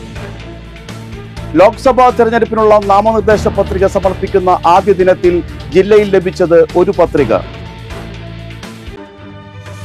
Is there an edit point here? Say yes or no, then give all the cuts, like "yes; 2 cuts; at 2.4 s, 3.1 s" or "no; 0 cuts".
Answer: no; 0 cuts